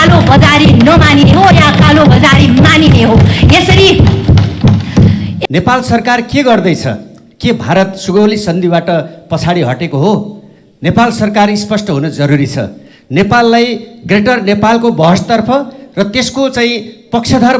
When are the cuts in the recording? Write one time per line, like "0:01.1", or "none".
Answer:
0:05.3